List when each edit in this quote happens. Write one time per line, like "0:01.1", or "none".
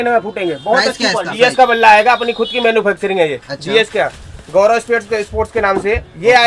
0:01.3